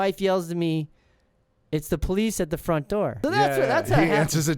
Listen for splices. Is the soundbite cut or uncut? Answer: cut